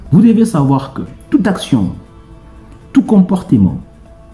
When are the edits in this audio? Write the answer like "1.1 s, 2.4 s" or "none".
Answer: none